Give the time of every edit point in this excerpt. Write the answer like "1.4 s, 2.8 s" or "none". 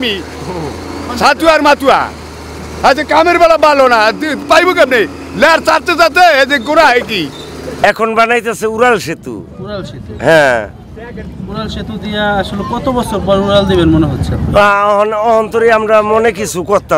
7.8 s